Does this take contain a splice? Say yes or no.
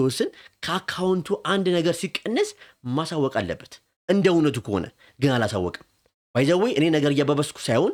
no